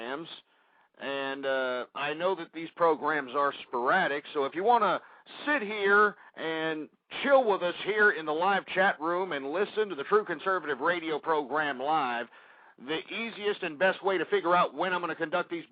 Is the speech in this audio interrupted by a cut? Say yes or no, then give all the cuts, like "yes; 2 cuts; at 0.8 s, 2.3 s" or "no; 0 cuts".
no; 0 cuts